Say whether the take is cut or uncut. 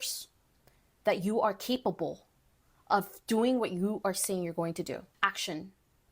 cut